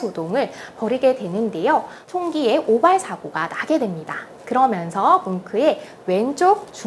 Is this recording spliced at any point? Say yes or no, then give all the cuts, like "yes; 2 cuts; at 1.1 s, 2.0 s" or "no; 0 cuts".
yes; 1 cut; at 2.0 s